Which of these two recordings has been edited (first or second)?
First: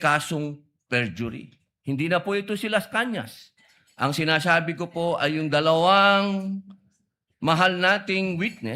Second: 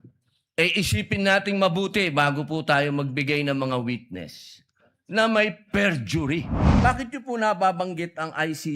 second